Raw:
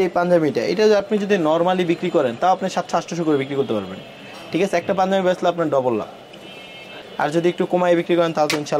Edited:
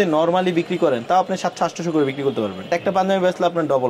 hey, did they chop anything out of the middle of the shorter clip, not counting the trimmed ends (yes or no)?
yes